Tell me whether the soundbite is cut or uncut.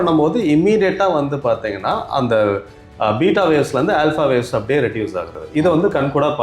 cut